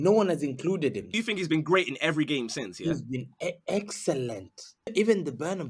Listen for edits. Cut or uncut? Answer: cut